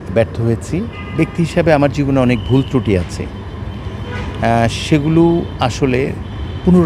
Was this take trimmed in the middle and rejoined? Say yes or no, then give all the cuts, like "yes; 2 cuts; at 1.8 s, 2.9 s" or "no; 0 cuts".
yes; 1 cut; at 1.0 s